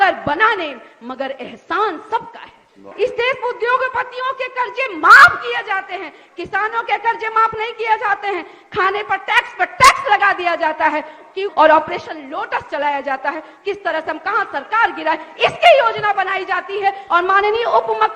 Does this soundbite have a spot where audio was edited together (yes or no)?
yes